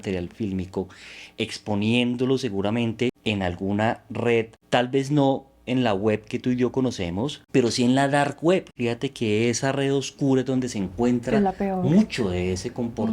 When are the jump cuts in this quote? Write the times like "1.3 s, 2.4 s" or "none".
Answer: 3.2 s, 4.6 s, 7.4 s, 8.7 s